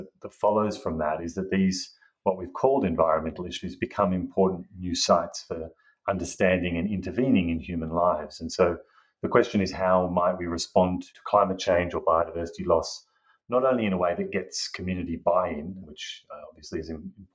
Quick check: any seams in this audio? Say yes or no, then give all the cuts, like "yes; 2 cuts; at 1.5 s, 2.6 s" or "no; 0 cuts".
yes; 2 cuts; at 11.1 s, 15.8 s